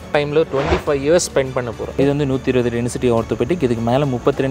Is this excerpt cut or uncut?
cut